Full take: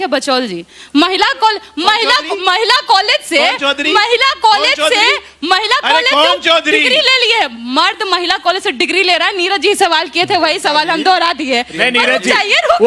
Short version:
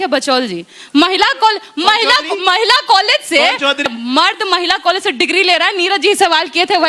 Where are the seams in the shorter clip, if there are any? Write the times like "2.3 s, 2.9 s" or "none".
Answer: 3.9 s